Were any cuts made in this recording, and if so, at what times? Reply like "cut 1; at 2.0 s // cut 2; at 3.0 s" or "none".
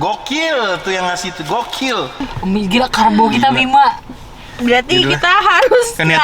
cut 1; at 2.2 s